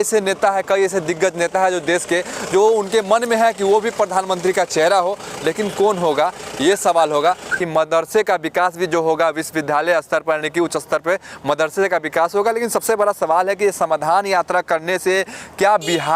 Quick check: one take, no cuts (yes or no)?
no